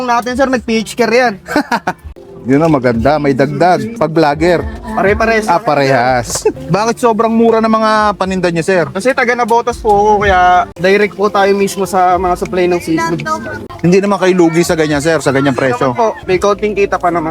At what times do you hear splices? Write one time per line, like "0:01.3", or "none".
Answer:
0:03.9
0:06.6
0:16.2